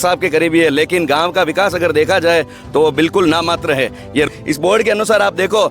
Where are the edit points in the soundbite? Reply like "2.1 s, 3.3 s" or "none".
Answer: 4.3 s